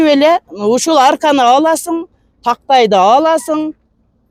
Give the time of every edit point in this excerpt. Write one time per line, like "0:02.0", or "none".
none